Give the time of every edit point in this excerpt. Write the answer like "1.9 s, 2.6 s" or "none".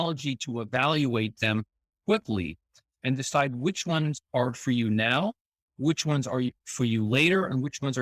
none